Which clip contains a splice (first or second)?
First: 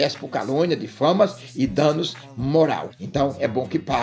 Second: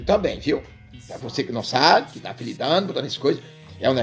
first